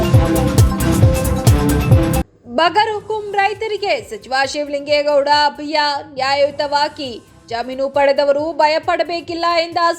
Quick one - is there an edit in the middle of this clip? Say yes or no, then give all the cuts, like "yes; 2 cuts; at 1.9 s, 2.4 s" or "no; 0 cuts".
yes; 1 cut; at 2.2 s